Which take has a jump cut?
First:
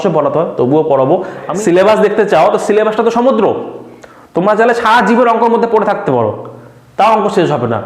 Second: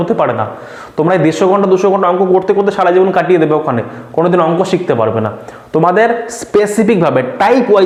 first; 1 cut; at 1.5 s

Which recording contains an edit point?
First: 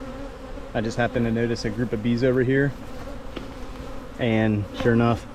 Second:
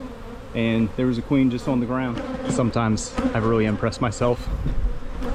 second; 1 cut; at 2.2 s

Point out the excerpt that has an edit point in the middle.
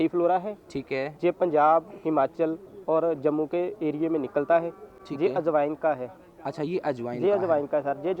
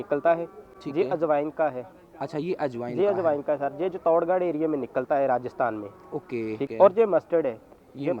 second; 1 cut; at 6.7 s

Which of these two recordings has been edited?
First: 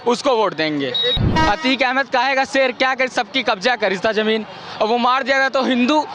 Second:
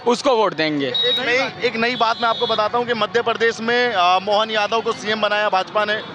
first; 1 cut; at 1.2 s

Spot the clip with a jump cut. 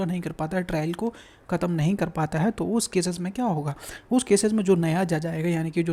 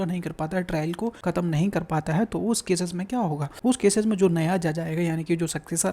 second; 2 cuts; at 1.2 s, 3.5 s

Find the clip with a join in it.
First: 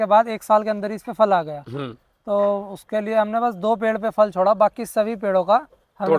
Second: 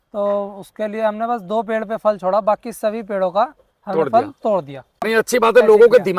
second; 1 cut; at 5.0 s

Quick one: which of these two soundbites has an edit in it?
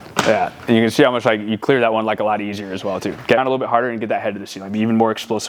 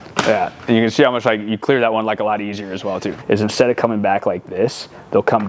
second; 1 cut; at 3.1 s

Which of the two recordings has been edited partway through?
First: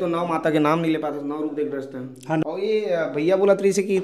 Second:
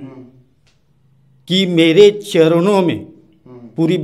first; 1 cut; at 2.4 s

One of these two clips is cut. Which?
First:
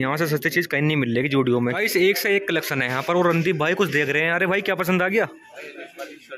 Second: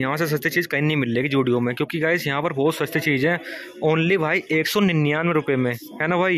first; 1 cut; at 1.7 s

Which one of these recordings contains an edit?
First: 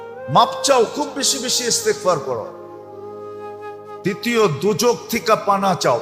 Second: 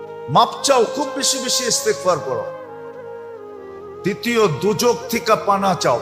second; 2 cuts; at 2.5 s, 4.0 s

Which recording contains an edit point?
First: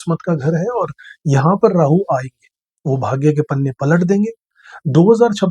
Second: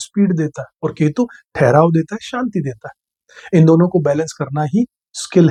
first; 1 cut; at 4.5 s

